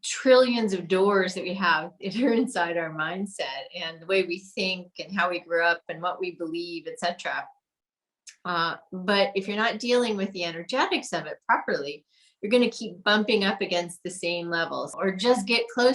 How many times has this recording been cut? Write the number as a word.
one